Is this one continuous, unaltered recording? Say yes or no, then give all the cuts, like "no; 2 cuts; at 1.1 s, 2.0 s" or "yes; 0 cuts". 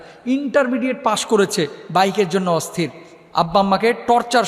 yes; 0 cuts